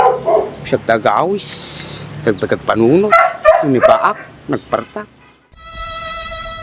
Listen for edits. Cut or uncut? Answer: uncut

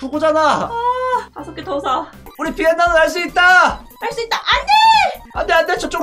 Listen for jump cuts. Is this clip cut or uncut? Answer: cut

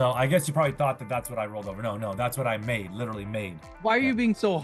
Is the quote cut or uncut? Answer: cut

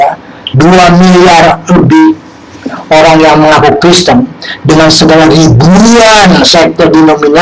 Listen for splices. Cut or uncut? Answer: uncut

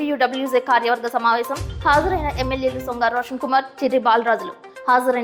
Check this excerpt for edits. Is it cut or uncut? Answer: uncut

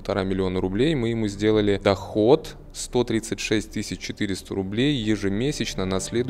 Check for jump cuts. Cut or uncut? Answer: uncut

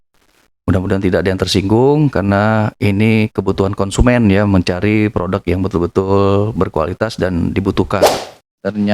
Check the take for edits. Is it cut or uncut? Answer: cut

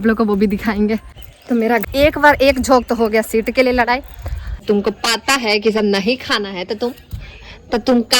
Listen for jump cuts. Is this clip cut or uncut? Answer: cut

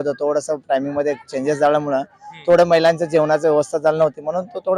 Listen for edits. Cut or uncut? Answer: uncut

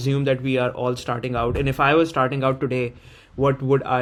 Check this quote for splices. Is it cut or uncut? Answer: uncut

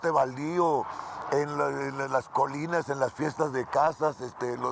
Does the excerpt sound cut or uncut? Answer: uncut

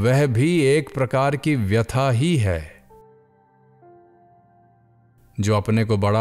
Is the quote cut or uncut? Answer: cut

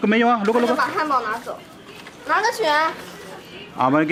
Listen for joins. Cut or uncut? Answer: uncut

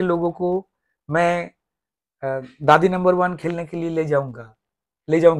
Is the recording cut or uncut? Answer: uncut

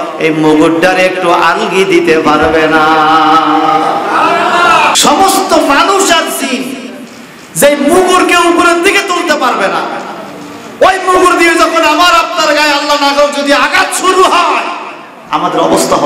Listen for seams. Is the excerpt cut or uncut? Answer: cut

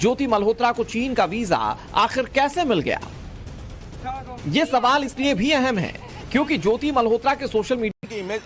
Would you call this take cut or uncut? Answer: uncut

